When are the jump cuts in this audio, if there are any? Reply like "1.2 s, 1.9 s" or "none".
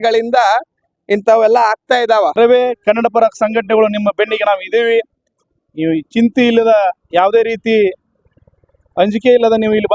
2.4 s